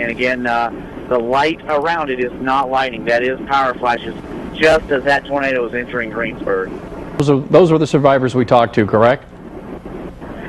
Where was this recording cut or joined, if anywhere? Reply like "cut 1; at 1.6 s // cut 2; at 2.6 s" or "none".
cut 1; at 7.2 s